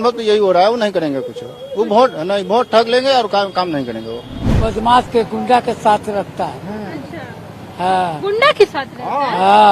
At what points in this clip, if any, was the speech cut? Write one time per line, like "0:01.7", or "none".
0:04.4